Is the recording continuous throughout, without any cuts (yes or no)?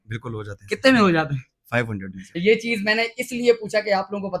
yes